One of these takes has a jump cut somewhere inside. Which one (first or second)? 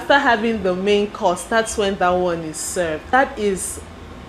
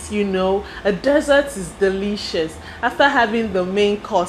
first